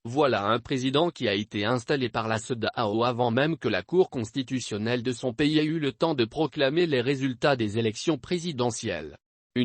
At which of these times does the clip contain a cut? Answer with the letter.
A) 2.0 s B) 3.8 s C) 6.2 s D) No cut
B